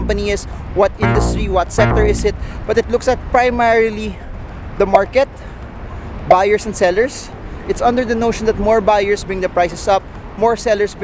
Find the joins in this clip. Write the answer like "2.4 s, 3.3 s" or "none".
none